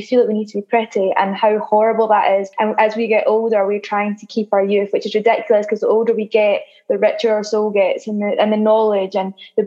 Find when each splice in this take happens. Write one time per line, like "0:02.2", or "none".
0:02.5